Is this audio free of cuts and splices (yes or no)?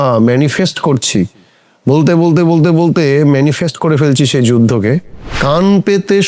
no